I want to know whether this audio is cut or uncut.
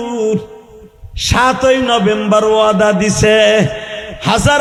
uncut